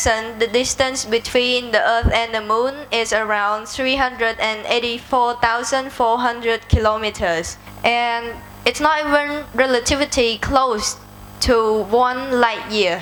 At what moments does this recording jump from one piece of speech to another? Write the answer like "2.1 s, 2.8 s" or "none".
none